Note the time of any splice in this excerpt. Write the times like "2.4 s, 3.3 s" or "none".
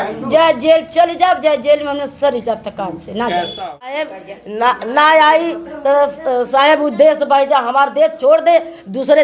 4.1 s